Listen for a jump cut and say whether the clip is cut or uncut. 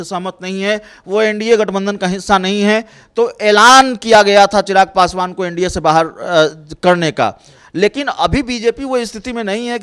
uncut